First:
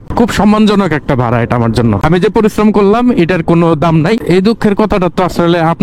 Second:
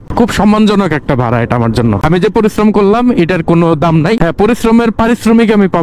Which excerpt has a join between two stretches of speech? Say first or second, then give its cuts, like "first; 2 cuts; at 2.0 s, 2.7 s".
first; 1 cut; at 4.2 s